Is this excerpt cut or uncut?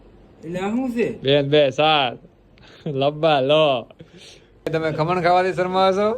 cut